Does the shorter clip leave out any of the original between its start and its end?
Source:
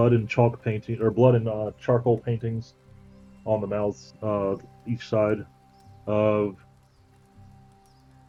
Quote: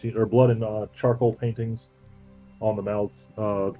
no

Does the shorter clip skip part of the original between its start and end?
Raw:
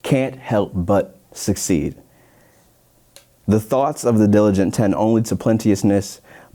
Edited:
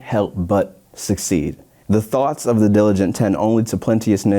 yes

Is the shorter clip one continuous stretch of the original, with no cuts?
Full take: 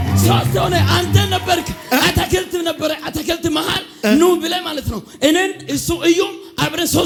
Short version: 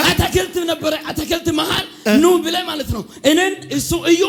yes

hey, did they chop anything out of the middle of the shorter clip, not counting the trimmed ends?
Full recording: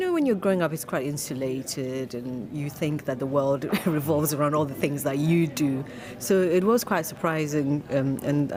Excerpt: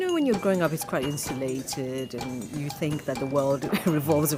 no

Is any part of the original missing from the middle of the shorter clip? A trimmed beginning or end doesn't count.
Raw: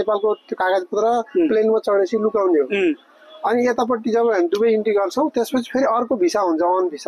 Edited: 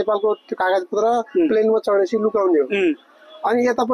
no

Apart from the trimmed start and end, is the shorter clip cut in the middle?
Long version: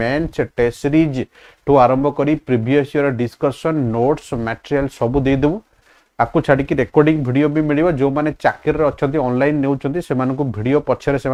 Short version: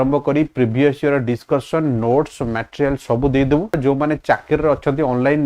yes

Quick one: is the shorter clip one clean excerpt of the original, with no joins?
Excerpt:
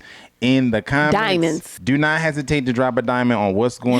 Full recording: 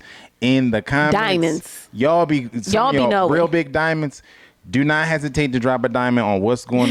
no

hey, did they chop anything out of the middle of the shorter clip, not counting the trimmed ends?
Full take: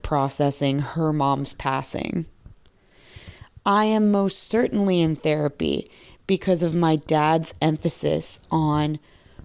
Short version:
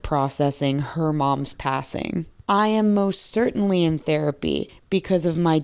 yes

